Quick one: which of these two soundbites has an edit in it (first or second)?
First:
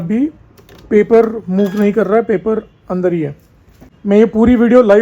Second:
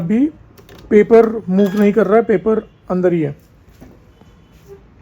first